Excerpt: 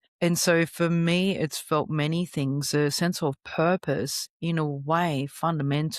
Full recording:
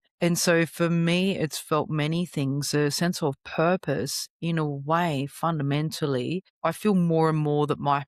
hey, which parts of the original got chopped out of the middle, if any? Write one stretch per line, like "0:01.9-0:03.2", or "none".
none